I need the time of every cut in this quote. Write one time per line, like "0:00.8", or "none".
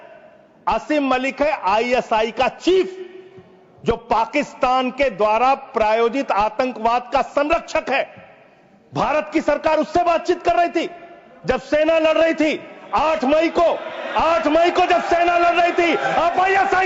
none